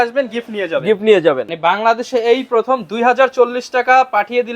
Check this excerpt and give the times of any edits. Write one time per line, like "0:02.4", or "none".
0:01.5